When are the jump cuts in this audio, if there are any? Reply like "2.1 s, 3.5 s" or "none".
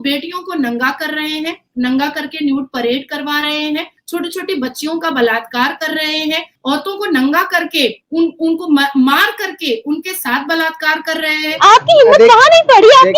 11.4 s